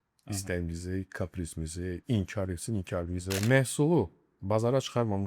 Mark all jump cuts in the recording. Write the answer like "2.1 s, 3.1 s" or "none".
3.3 s